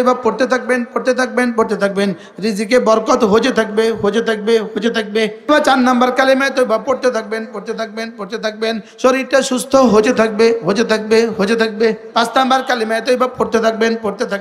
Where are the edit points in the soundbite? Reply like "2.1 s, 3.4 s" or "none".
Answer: 5.5 s, 12.0 s